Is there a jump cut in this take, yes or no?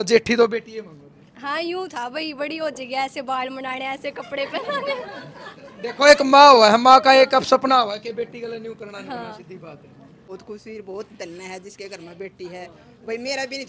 yes